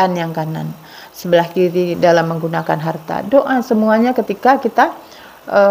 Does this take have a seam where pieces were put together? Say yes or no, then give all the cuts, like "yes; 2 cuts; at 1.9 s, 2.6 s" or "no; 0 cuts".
no; 0 cuts